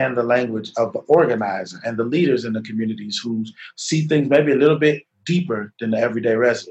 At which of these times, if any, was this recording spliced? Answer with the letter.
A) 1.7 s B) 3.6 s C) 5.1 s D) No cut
D